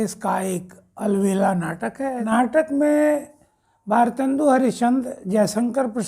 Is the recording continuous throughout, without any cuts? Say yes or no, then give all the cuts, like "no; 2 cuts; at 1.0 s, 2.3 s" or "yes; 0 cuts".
no; 1 cut; at 2.2 s